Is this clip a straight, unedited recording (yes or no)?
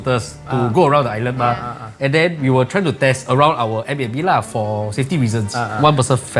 yes